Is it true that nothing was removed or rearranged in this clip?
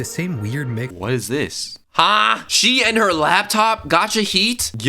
no; 1 cut; at 2.4 s

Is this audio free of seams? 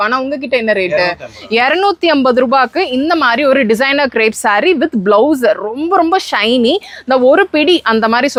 yes; 0 cuts

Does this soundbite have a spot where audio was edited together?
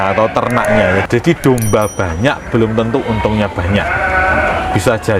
yes; 1 cut; at 1.0 s

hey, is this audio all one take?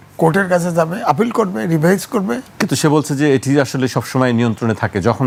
yes; 0 cuts

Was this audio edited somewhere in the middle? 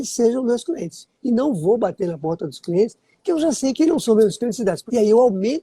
yes; 2 cuts; at 3.7 s, 4.8 s

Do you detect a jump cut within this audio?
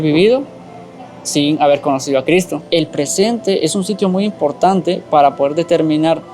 yes; 1 cut; at 2.6 s

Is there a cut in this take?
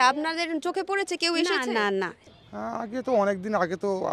yes; 1 cut; at 2.2 s

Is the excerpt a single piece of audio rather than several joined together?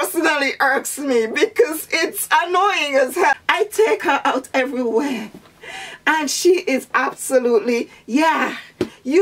no; 1 cut; at 3.4 s

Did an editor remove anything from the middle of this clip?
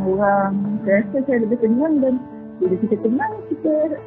no; 0 cuts

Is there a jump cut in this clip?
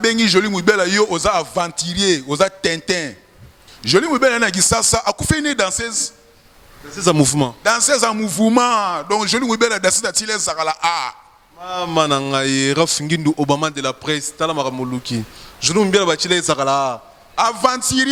no; 0 cuts

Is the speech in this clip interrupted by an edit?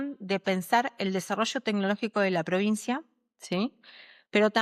no; 0 cuts

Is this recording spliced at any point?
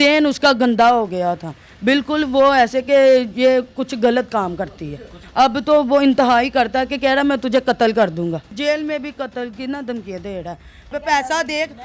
yes; 3 cuts; at 5.2 s, 8.5 s, 10.9 s

